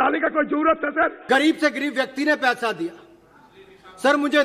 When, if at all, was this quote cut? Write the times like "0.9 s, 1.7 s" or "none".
1.2 s